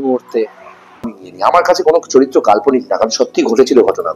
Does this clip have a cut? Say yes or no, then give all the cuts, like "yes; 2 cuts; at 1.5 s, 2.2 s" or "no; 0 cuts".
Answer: yes; 1 cut; at 1.2 s